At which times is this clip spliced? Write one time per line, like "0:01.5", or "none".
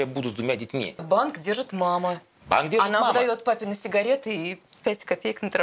0:01.0